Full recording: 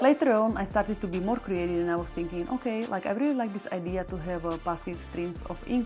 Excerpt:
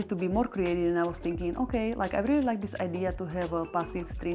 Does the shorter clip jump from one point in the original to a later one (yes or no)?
no